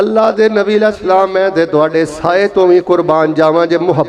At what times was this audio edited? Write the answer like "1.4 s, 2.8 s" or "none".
none